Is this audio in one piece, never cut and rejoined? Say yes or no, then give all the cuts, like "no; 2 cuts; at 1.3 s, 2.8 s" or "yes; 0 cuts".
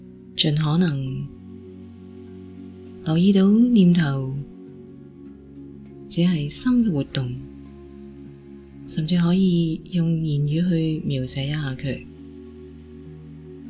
no; 1 cut; at 12.4 s